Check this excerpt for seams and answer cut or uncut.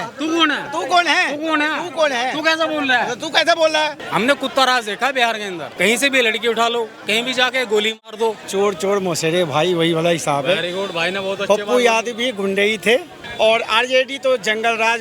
cut